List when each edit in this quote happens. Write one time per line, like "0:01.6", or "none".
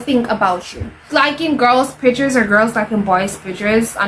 0:01.1

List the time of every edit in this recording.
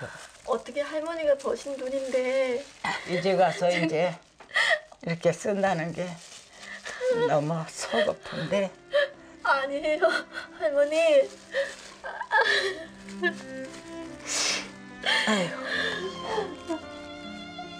0:03.0
0:16.2

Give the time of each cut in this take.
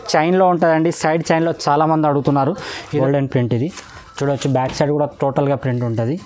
0:02.8

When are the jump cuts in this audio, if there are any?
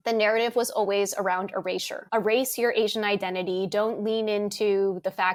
none

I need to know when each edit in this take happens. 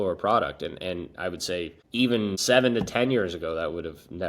0:02.1

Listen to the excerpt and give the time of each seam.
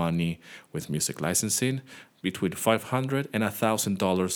none

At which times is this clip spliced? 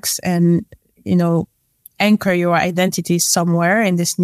none

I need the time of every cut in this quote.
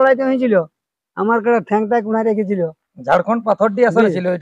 none

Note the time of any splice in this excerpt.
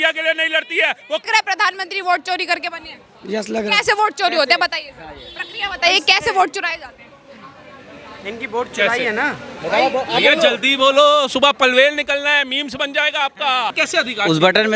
0:01.3
0:13.7

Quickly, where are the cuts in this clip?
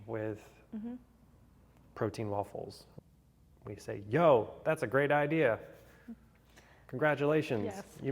0:02.8

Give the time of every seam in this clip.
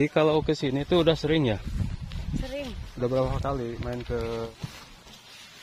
0:04.5

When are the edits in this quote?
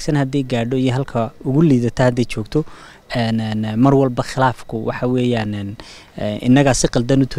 none

